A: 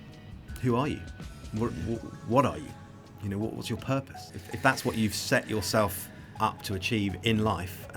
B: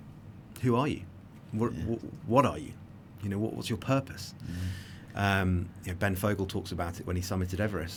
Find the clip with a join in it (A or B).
A